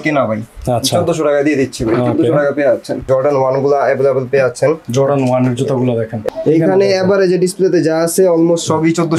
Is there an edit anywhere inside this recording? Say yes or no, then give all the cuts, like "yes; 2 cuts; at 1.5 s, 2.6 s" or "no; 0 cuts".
yes; 2 cuts; at 3.0 s, 6.1 s